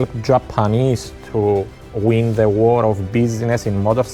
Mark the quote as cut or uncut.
uncut